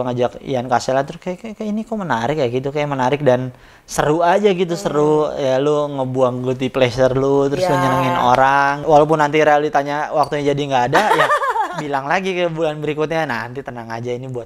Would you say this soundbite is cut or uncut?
uncut